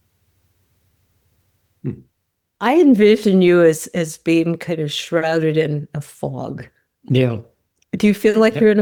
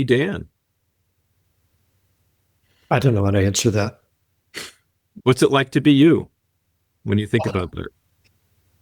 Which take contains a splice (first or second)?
second